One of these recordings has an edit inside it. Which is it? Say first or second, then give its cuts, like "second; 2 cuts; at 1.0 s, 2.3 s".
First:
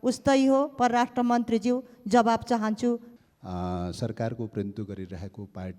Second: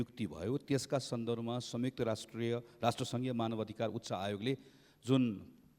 first; 1 cut; at 3.1 s